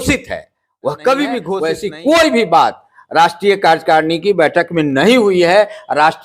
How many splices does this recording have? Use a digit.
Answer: 1